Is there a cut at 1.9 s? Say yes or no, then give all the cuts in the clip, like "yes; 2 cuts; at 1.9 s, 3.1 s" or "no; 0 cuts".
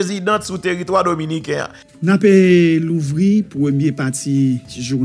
yes; 1 cut; at 1.9 s